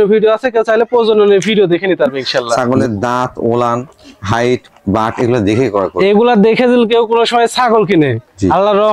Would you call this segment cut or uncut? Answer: cut